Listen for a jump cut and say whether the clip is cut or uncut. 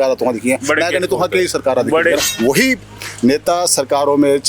cut